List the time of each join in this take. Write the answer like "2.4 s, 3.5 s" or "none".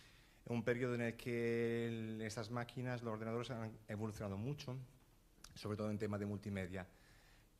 6.0 s

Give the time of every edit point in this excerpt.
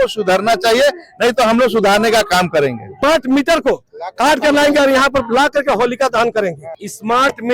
2.9 s, 6.6 s

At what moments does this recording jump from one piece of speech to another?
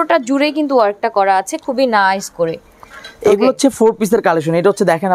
none

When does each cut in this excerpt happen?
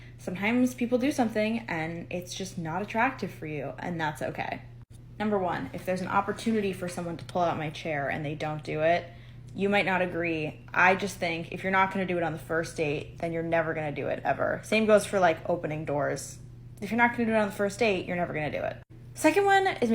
5.7 s, 15.3 s

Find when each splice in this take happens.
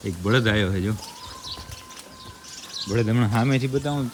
none

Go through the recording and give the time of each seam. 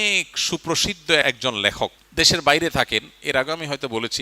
1.5 s

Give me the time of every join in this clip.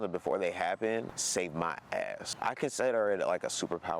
2.2 s

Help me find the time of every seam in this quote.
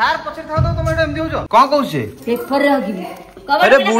1.4 s

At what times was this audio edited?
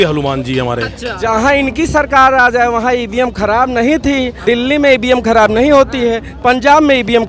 1.2 s, 4.4 s

